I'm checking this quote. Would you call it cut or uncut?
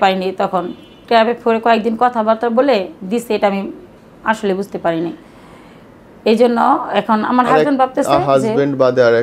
uncut